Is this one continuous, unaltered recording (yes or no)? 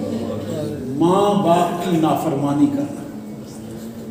yes